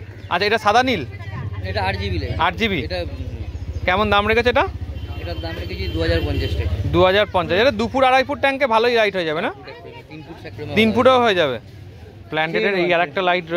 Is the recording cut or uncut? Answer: uncut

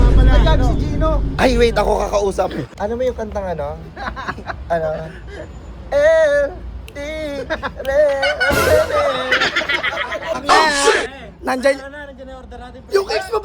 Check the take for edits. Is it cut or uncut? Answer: cut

